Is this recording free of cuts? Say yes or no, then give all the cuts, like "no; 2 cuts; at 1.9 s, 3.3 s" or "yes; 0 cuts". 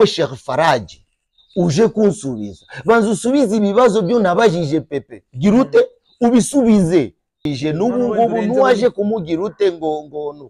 no; 1 cut; at 7.5 s